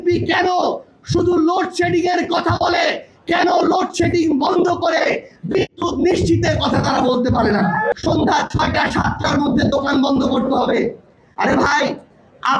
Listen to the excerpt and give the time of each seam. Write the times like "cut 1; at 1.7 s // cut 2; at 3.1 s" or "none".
cut 1; at 7.9 s